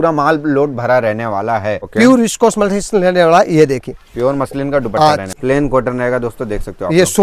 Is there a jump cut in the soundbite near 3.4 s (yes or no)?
no